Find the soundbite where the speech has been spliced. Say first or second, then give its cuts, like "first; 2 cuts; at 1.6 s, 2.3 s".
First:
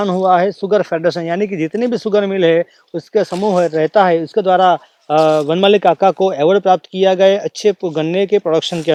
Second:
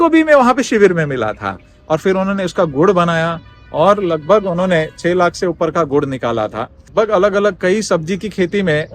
second; 2 cuts; at 1.7 s, 6.9 s